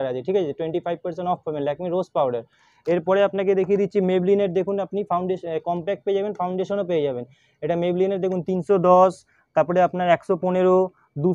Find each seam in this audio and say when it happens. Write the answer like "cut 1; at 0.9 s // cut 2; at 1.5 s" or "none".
none